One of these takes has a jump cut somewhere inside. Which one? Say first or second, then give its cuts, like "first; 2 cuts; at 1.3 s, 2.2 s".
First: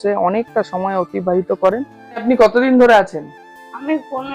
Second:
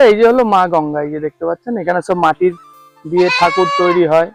first; 1 cut; at 2.2 s